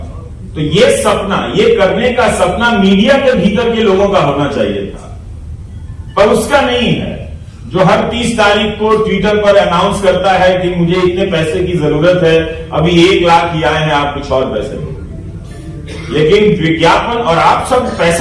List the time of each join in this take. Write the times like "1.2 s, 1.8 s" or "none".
none